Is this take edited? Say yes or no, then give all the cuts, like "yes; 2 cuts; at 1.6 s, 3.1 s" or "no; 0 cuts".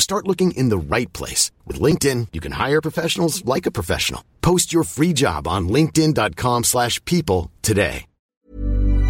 yes; 1 cut; at 8.2 s